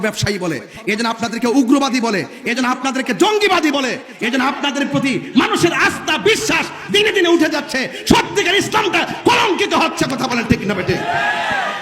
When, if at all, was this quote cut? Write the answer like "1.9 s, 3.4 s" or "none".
none